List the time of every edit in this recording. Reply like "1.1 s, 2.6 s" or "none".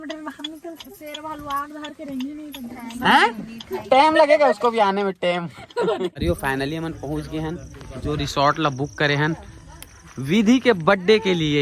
6.2 s